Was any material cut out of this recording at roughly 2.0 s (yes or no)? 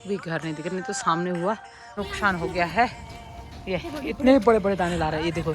yes